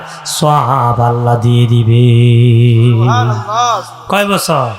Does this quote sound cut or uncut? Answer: uncut